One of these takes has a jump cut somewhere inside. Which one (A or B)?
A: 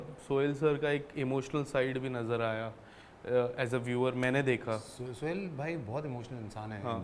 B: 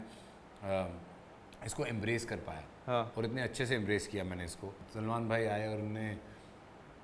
B